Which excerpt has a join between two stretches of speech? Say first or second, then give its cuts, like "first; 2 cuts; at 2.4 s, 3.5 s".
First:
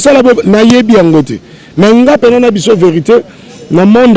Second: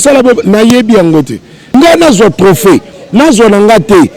second; 1 cut; at 1.7 s